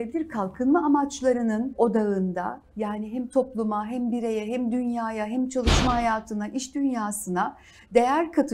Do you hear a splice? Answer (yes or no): yes